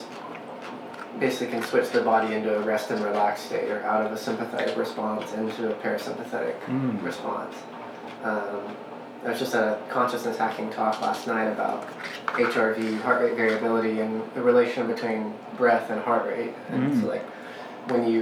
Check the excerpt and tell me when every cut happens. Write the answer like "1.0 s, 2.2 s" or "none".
none

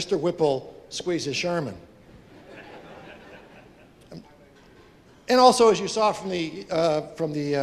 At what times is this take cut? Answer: none

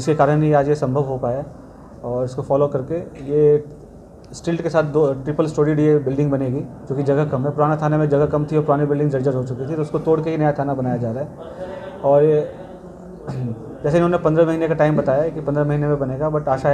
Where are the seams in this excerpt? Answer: none

